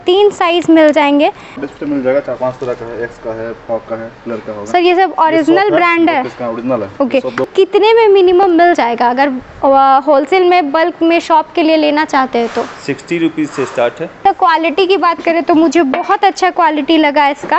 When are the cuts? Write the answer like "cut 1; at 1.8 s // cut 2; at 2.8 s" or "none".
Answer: cut 1; at 1.6 s // cut 2; at 7.5 s // cut 3; at 14.2 s